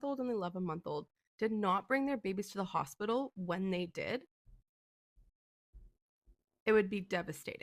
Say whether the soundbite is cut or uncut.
uncut